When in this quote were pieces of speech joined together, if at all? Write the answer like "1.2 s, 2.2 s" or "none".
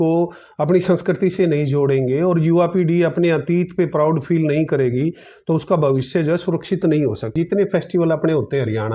7.4 s